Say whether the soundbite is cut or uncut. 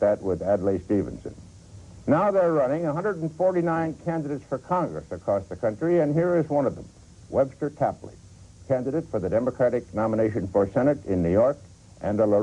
cut